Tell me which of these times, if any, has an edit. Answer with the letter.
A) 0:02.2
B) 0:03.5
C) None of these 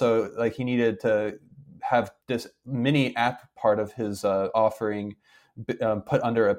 A